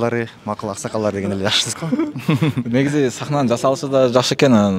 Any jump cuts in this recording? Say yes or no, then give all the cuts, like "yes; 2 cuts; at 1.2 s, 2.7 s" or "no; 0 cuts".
no; 0 cuts